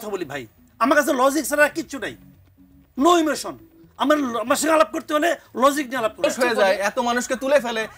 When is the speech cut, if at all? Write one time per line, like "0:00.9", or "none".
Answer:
0:06.2